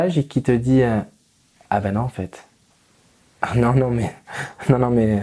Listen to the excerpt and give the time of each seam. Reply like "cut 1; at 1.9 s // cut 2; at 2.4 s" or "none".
none